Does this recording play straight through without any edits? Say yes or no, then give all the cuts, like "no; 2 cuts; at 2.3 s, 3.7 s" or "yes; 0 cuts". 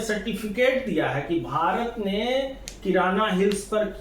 yes; 0 cuts